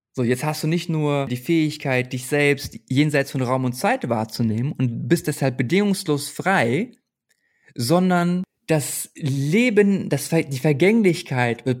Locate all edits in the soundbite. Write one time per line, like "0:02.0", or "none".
0:01.4
0:08.5